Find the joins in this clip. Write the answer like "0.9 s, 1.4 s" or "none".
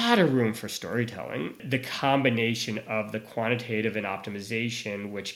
1.5 s